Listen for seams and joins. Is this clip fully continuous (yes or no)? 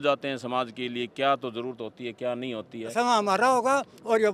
no